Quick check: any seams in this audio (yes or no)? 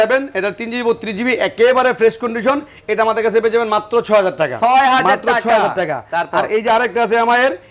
no